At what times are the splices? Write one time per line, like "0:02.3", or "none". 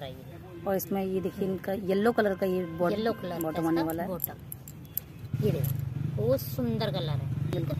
none